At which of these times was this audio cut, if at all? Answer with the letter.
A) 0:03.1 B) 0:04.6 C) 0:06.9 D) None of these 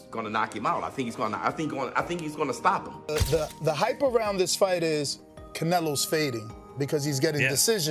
A